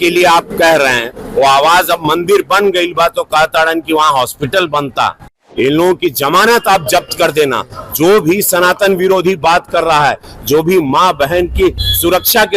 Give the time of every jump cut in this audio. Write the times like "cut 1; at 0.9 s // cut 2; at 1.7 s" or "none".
cut 1; at 5.4 s